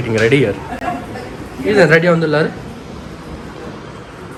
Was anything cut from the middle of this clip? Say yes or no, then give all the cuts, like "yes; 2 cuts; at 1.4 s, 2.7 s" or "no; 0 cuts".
no; 0 cuts